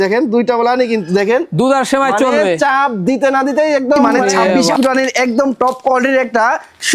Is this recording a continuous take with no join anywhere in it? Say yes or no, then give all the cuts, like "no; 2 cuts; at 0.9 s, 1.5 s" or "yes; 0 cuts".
no; 1 cut; at 4.7 s